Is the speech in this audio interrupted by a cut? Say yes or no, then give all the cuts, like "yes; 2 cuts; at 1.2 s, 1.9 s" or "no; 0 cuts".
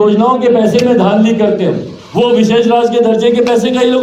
no; 0 cuts